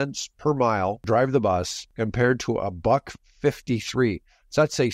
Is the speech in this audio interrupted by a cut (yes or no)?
yes